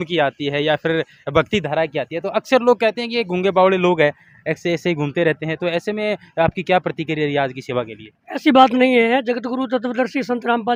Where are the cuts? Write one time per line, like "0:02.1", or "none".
none